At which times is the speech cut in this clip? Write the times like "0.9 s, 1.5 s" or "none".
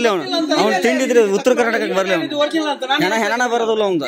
none